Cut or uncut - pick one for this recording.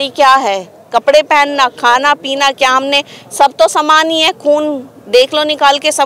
uncut